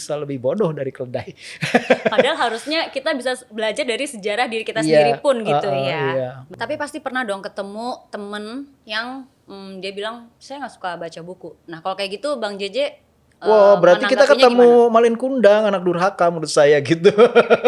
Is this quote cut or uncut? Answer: cut